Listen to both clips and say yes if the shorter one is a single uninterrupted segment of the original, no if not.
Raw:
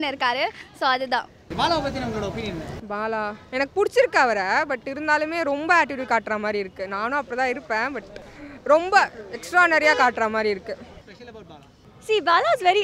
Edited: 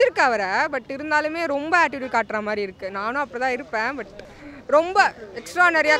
yes